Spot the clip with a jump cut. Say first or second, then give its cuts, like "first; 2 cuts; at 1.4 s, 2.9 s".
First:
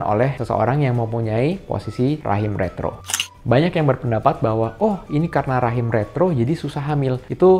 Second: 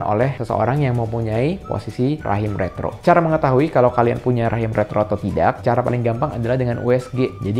first; 1 cut; at 3.0 s